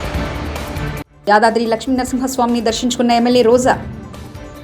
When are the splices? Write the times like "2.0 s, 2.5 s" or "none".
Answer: 1.0 s